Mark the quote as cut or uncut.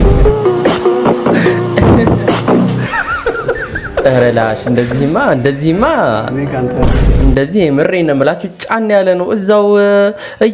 uncut